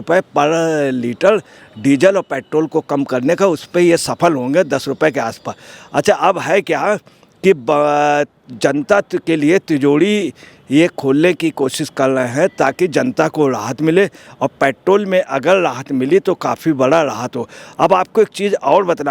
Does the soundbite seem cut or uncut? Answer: uncut